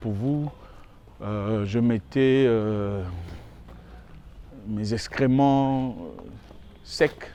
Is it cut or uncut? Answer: uncut